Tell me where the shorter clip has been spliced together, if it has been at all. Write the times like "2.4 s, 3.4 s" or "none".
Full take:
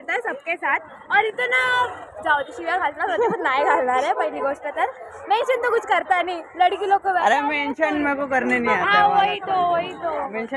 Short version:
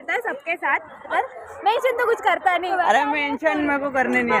1.0 s, 2.7 s